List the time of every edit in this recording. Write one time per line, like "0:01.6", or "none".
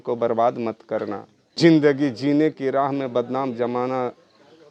0:01.5